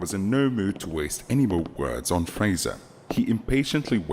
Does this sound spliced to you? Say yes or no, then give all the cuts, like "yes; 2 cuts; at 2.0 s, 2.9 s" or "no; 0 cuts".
no; 0 cuts